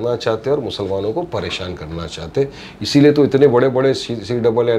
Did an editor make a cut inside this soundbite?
no; 0 cuts

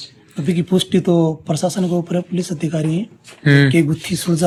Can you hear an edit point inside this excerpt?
no; 0 cuts

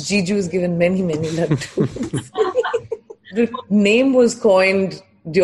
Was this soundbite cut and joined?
yes; 1 cut; at 3.3 s

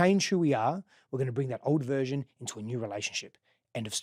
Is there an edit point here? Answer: no; 0 cuts

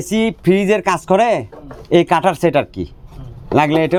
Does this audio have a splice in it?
no; 0 cuts

